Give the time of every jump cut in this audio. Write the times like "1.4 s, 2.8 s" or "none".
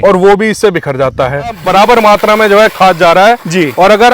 1.6 s